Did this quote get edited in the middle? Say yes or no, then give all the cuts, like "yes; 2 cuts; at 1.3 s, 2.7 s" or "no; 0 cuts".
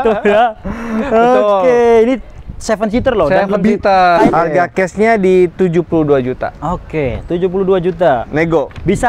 yes; 1 cut; at 4.3 s